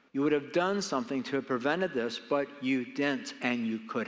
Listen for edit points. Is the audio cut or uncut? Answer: uncut